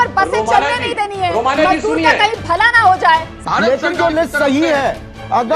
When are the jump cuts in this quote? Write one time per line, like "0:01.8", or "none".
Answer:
0:03.3